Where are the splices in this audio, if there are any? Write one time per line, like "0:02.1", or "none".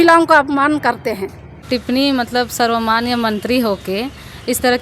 0:01.6